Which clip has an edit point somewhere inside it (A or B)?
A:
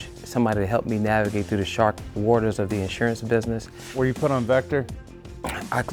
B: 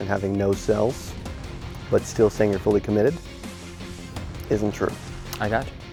A